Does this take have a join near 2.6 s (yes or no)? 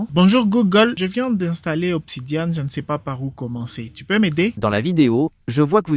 no